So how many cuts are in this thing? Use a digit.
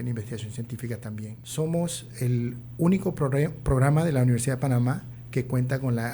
2